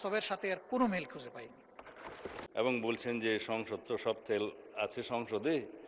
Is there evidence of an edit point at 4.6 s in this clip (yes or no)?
no